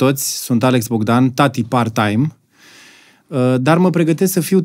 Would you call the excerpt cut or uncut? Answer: uncut